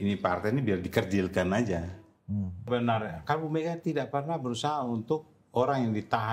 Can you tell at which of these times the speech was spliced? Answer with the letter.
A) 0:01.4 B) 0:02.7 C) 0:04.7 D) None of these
B